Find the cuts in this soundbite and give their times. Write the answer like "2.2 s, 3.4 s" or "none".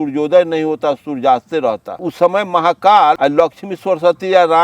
2.0 s, 3.2 s

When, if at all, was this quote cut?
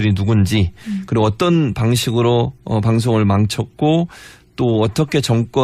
2.2 s

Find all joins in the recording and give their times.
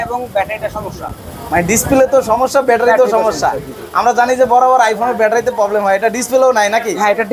none

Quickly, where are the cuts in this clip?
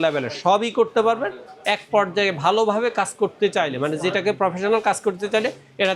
none

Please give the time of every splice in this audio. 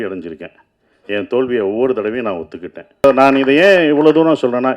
3.0 s

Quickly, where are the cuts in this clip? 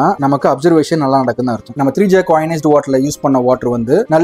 1.7 s

